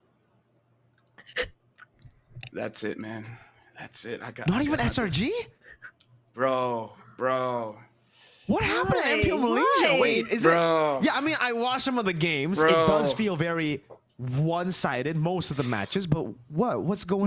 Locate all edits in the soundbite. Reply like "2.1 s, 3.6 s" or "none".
none